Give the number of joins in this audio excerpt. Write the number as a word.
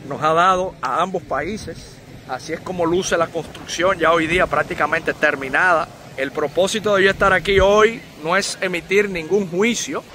zero